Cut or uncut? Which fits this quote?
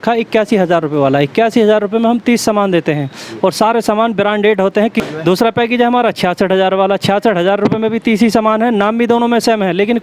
cut